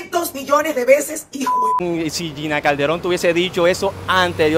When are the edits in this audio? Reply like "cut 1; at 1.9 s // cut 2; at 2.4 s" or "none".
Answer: cut 1; at 1.8 s